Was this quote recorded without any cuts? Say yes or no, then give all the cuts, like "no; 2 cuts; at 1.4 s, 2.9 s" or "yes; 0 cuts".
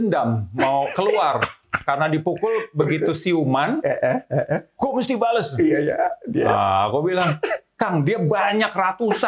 yes; 0 cuts